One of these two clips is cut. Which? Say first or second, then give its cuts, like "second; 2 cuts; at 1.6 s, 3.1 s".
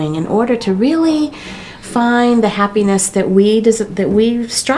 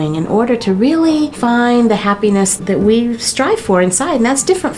second; 2 cuts; at 1.3 s, 2.6 s